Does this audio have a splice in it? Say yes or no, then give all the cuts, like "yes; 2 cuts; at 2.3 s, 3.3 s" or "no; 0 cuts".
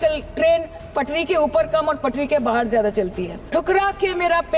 yes; 1 cut; at 3.3 s